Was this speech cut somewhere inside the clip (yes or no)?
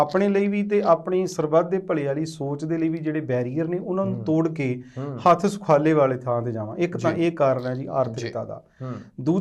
no